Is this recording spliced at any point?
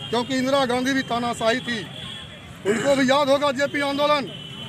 no; 0 cuts

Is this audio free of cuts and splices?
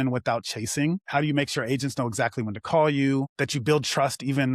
yes; 0 cuts

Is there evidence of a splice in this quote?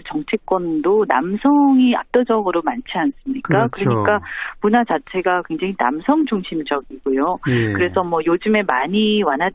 yes; 1 cut; at 7.4 s

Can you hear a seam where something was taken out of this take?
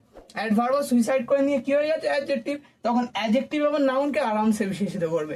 no; 0 cuts

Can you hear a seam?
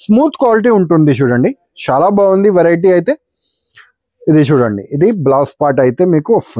no; 0 cuts

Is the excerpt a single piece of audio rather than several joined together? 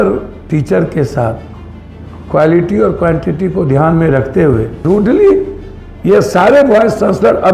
no; 1 cut; at 4.8 s

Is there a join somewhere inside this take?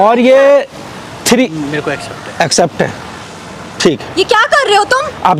no; 0 cuts

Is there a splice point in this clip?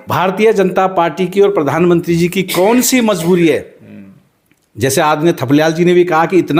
no; 0 cuts

